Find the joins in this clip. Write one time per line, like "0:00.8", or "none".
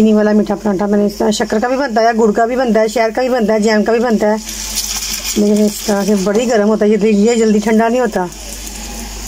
none

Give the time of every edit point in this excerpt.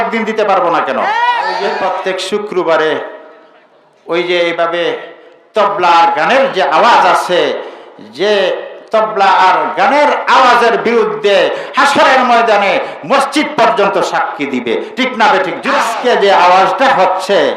0:01.8
0:15.7

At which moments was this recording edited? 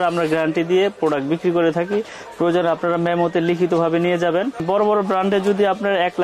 0:04.6

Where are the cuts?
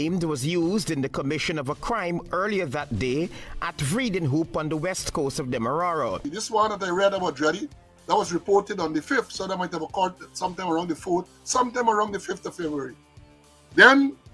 0:06.4

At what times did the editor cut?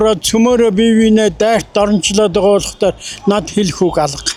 none

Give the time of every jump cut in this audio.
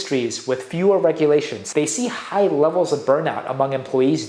0:01.6

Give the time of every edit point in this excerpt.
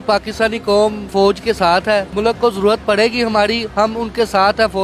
0:01.1
0:02.1

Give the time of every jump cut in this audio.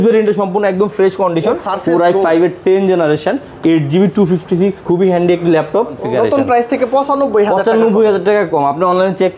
0:01.6
0:06.0

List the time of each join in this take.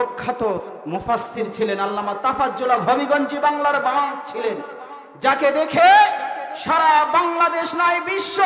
none

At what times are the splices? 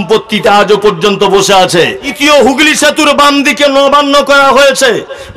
0:02.1

